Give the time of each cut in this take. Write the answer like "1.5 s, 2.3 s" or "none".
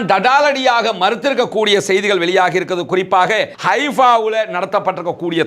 3.5 s